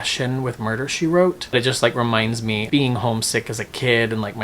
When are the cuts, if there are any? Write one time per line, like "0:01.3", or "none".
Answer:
0:01.5
0:02.7